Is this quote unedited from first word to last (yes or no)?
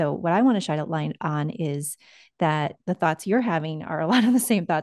yes